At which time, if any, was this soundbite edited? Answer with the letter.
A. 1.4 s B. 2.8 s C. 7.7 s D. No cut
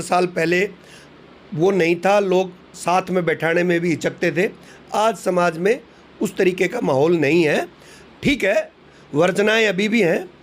D